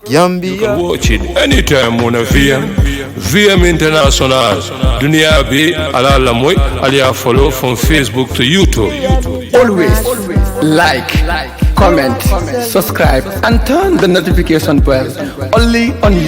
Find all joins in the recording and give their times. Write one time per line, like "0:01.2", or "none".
0:01.0